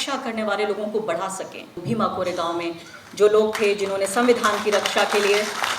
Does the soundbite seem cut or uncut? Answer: cut